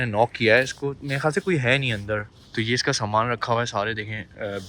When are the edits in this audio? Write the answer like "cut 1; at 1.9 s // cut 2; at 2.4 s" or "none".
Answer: cut 1; at 2.4 s